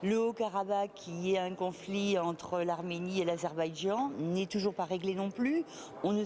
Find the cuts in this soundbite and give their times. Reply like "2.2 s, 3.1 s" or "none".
none